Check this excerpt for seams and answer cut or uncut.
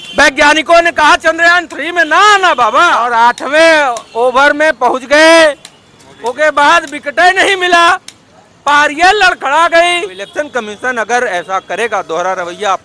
cut